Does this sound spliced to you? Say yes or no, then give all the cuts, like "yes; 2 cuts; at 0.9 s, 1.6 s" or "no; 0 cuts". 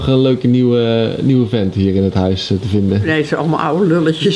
yes; 1 cut; at 3.1 s